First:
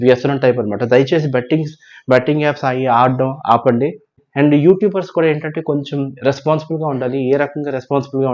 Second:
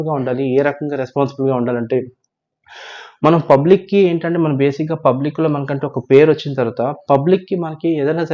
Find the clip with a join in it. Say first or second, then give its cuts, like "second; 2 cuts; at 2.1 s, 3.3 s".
first; 1 cut; at 4.2 s